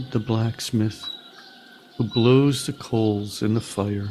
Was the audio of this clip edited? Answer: no; 0 cuts

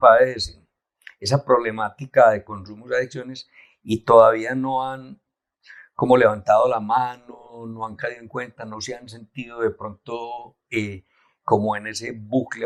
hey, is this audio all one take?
yes; 0 cuts

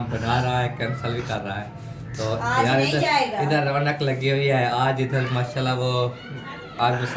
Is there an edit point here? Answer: no; 0 cuts

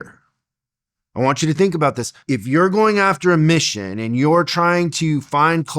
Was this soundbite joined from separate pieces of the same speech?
no; 0 cuts

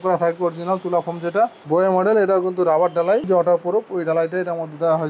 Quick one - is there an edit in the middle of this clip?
yes; 2 cuts; at 1.6 s, 3.3 s

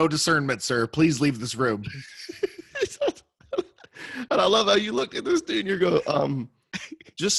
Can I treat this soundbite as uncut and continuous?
yes; 0 cuts

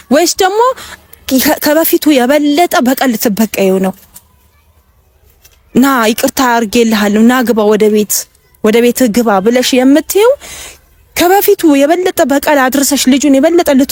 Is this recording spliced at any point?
no; 0 cuts

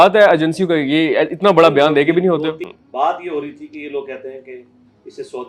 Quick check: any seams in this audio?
yes; 1 cut; at 2.7 s

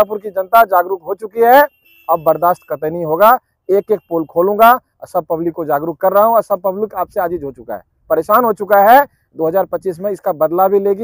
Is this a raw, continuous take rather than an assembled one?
yes; 0 cuts

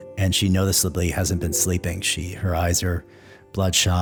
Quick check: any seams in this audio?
no; 0 cuts

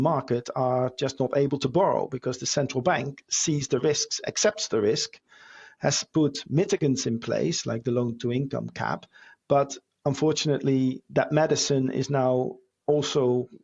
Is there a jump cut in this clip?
no; 0 cuts

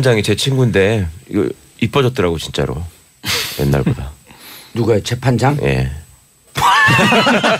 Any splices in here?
yes; 1 cut; at 1.0 s

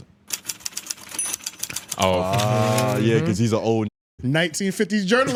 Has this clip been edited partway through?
no; 0 cuts

